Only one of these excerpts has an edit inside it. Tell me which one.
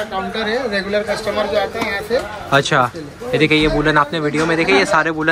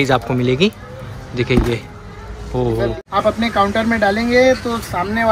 second; 1 cut; at 3.0 s

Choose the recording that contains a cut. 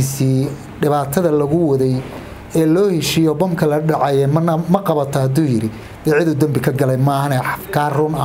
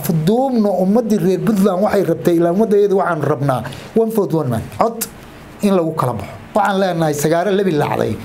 second; 1 cut; at 6.4 s

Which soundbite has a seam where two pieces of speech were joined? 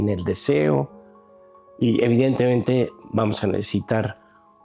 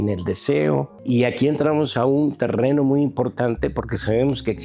second; 1 cut; at 0.9 s

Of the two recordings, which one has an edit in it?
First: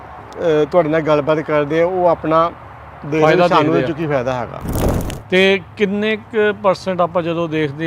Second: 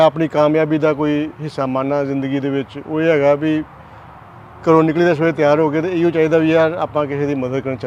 first; 1 cut; at 4.6 s

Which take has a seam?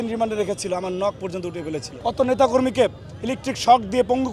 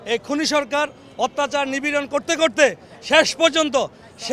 first; 1 cut; at 1.9 s

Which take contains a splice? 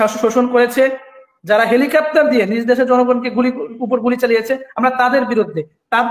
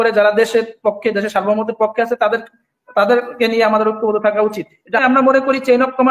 second; 1 cut; at 5.0 s

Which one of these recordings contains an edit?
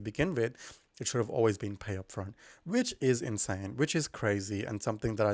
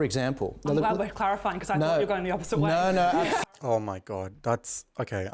second; 1 cut; at 3.4 s

